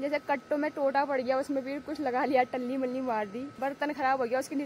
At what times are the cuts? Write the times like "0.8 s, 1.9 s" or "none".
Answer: 3.4 s